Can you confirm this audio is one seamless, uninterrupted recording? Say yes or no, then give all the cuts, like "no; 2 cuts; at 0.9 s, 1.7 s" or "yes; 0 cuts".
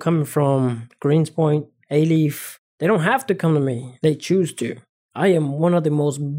no; 5 cuts; at 0.9 s, 1.8 s, 2.7 s, 3.9 s, 4.8 s